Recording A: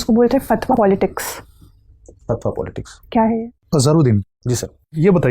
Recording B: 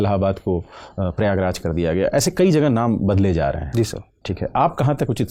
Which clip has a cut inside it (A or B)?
A